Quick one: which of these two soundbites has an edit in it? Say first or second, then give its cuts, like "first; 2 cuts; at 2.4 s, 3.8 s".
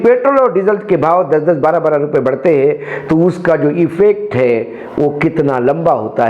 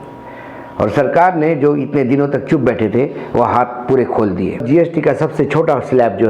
second; 1 cut; at 4.6 s